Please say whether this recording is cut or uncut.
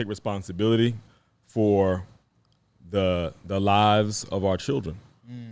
uncut